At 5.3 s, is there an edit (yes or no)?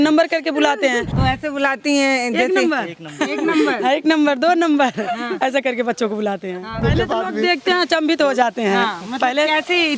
no